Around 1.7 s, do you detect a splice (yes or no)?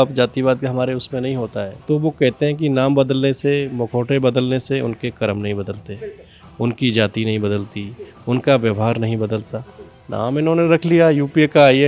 yes